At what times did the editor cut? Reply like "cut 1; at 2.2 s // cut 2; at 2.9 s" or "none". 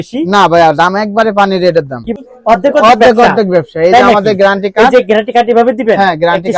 cut 1; at 2.1 s